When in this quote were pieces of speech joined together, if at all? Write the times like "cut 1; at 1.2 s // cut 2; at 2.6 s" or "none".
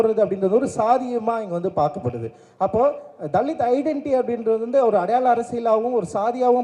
none